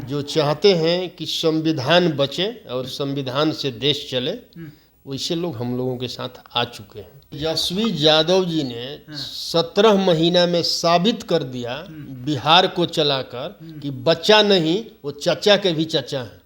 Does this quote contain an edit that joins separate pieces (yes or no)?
yes